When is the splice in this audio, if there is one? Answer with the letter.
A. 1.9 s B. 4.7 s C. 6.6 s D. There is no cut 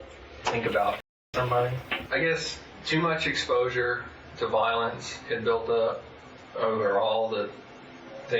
A